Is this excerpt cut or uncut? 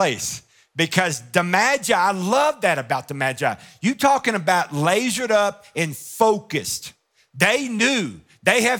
uncut